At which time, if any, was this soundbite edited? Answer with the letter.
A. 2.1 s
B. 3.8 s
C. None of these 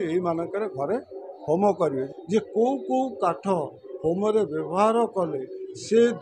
A